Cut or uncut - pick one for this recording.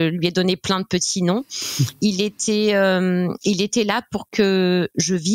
uncut